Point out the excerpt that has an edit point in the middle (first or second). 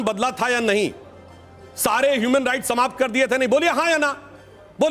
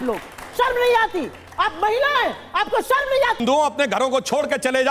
second